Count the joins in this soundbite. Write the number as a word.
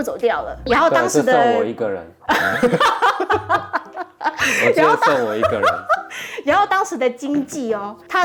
zero